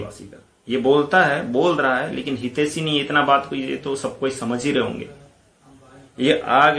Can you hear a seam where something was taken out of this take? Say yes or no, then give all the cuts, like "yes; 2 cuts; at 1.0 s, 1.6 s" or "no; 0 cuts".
no; 0 cuts